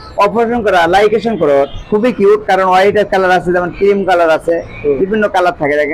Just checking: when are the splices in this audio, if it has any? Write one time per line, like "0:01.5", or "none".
0:01.7